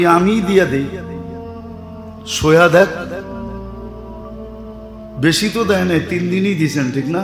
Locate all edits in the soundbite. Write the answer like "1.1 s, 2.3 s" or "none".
1.0 s, 2.3 s, 3.3 s, 5.2 s